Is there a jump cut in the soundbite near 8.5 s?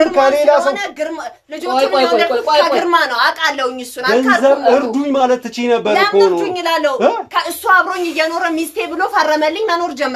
no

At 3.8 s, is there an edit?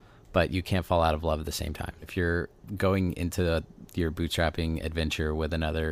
yes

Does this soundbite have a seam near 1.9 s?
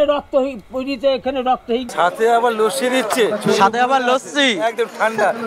yes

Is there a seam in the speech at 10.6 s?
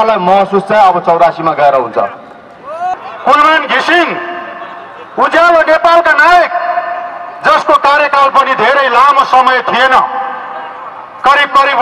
no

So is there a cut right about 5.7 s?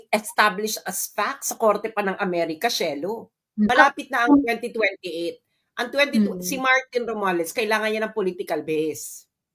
no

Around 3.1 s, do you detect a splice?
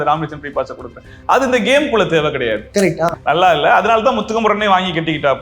yes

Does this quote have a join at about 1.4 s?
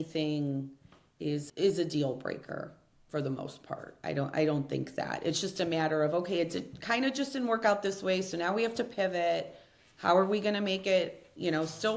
yes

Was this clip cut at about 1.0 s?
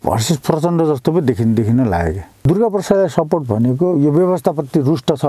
no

